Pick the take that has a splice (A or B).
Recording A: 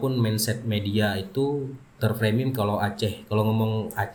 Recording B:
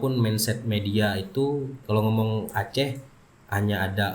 B